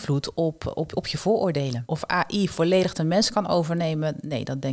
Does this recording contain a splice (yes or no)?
yes